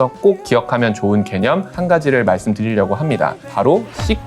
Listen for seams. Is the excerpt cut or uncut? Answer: cut